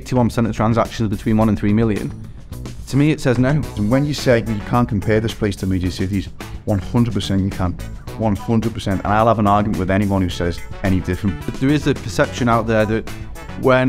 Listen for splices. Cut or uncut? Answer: cut